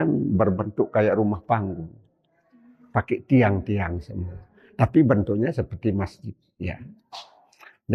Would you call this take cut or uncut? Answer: uncut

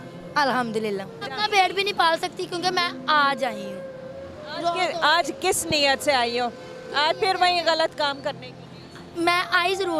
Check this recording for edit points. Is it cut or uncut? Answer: cut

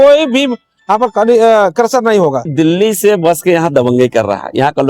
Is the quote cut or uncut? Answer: cut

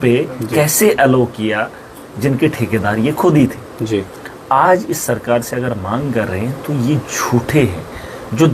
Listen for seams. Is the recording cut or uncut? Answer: uncut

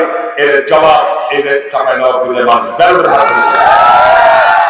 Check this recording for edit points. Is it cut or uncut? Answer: uncut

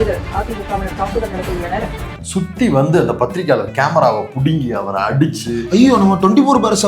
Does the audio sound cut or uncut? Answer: cut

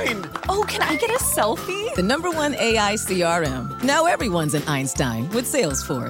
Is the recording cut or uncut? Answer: uncut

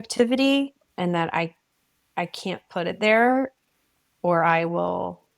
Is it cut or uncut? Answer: uncut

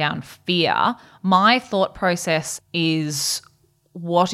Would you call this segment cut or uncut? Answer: cut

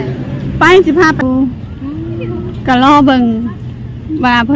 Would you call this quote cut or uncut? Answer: cut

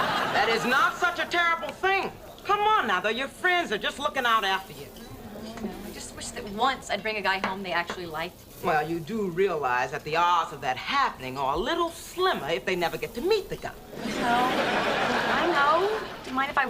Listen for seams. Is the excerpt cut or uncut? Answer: cut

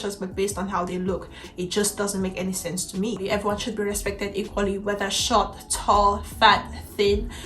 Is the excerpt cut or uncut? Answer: cut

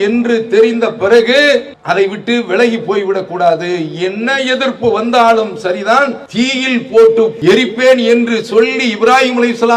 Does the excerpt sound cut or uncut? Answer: cut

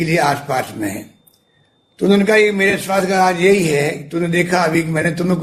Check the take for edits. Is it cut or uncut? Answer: uncut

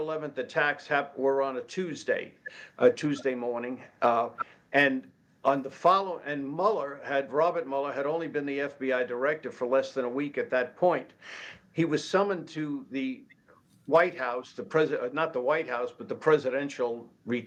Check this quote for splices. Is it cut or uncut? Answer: uncut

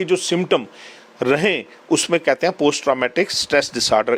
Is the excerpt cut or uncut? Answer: uncut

